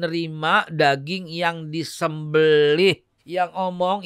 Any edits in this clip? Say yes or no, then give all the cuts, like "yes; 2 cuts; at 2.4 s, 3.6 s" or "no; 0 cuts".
yes; 1 cut; at 3.1 s